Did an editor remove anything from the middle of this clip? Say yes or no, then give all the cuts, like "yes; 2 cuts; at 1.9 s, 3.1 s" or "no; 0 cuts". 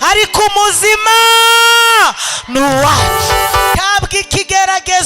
yes; 1 cut; at 3.8 s